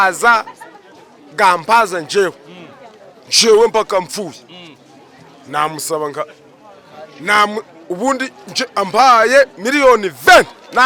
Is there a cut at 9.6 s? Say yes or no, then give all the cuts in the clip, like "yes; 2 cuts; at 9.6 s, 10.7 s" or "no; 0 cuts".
no; 0 cuts